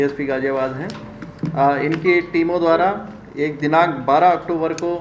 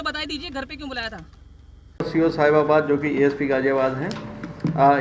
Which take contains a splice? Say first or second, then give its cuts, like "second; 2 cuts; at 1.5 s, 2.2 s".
second; 1 cut; at 1.9 s